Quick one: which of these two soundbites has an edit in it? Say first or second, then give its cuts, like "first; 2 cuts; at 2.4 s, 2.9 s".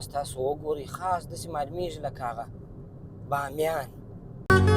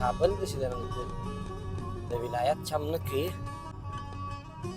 second; 1 cut; at 3.7 s